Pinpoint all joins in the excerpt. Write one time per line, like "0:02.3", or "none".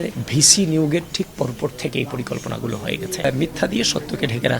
0:03.1